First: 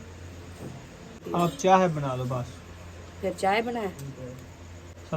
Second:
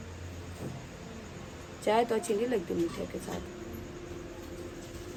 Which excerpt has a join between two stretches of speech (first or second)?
first